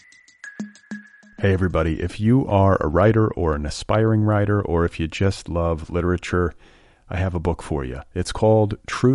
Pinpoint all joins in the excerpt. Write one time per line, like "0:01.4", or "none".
0:00.9